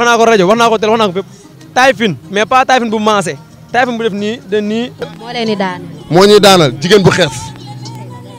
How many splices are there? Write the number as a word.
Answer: one